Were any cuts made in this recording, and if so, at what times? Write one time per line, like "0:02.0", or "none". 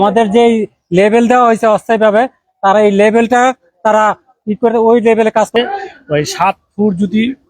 0:05.5